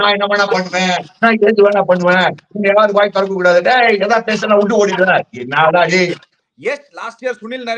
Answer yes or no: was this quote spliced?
yes